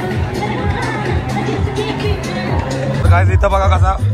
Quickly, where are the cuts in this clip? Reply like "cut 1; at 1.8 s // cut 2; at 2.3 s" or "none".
none